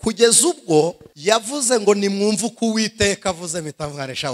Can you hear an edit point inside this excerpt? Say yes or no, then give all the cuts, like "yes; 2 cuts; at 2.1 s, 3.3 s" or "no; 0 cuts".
yes; 1 cut; at 1.1 s